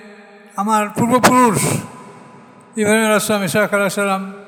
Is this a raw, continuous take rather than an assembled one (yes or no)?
yes